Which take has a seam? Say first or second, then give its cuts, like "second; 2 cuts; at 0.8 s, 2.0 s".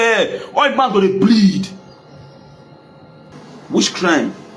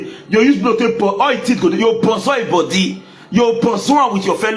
first; 1 cut; at 3.3 s